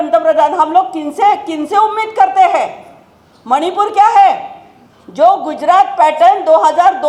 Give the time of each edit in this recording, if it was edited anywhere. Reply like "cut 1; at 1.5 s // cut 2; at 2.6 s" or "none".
none